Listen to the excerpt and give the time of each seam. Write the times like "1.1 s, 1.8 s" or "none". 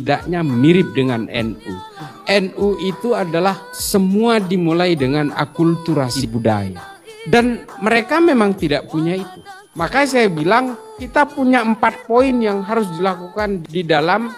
2.1 s, 9.6 s

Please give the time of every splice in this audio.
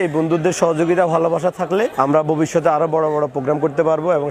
1.9 s

